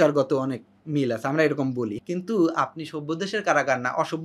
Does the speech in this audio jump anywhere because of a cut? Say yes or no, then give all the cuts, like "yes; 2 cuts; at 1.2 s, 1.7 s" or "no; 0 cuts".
yes; 1 cut; at 2.0 s